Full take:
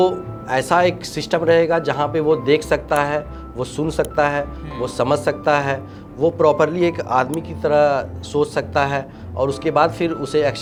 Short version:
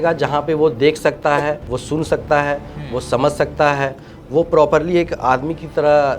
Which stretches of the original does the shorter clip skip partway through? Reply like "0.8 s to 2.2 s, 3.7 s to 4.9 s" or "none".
3.4 s to 3.6 s